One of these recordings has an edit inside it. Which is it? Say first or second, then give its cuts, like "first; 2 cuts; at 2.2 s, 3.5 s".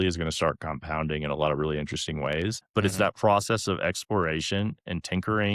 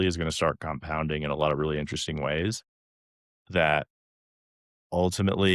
first; 1 cut; at 2.6 s